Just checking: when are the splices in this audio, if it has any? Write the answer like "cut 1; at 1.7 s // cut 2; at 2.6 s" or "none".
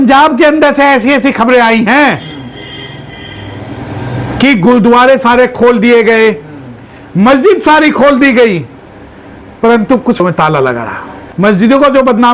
cut 1; at 11.2 s